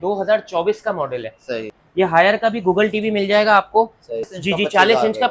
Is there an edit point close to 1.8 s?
yes; 2 cuts; at 1.8 s, 4.3 s

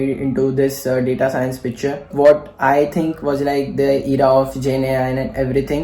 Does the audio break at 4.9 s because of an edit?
no; 1 cut; at 2.1 s

